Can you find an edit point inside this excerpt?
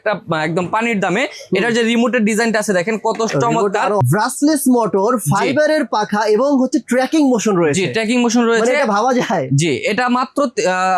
yes; 1 cut; at 4.0 s

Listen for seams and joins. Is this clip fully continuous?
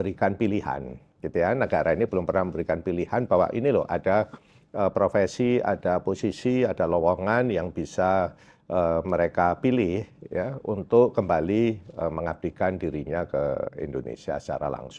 yes; 0 cuts

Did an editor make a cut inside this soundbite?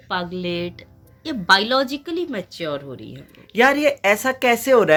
no; 0 cuts

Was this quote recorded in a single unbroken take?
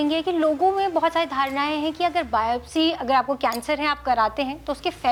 yes; 0 cuts

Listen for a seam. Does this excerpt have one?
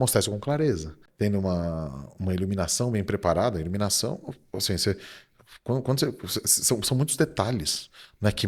yes; 1 cut; at 1.0 s

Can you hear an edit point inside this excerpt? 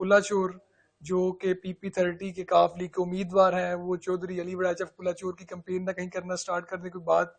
no; 0 cuts

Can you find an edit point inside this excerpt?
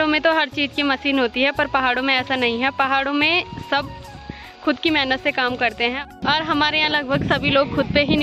no; 0 cuts

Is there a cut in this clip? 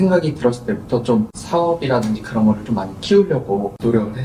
no; 0 cuts

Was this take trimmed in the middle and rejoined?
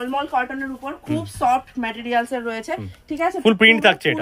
no; 0 cuts

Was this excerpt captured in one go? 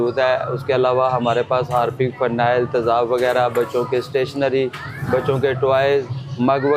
yes; 0 cuts

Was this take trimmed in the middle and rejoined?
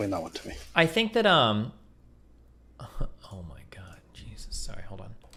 no; 0 cuts

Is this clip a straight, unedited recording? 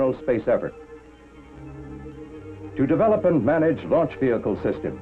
no; 1 cut; at 1.3 s

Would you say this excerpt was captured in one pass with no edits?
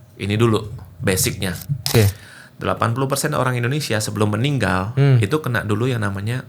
no; 1 cut; at 1.9 s

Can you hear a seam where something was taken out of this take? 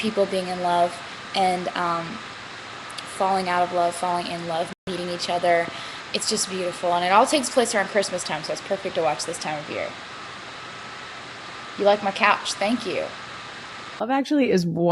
yes; 1 cut; at 14.0 s

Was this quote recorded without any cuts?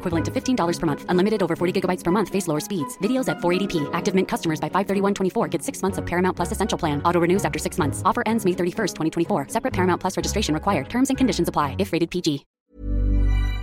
no; 1 cut; at 12.5 s

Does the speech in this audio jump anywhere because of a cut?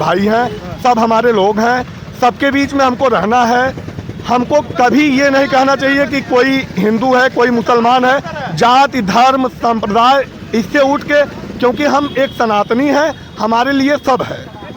no; 0 cuts

